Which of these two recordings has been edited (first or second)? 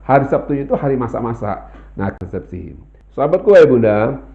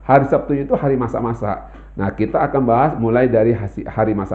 first